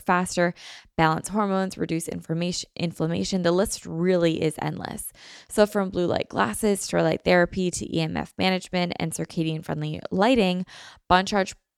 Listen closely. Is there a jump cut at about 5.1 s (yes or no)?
no